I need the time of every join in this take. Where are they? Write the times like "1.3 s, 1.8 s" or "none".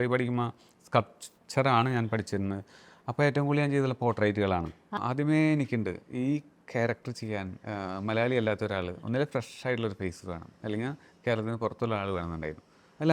5.0 s